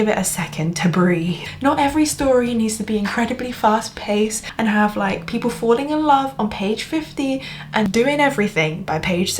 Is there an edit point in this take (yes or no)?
yes